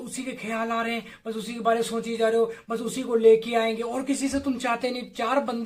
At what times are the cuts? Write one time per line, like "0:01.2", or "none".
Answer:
none